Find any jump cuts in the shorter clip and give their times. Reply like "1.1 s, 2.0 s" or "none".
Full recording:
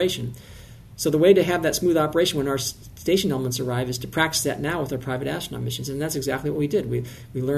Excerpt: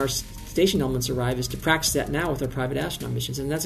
none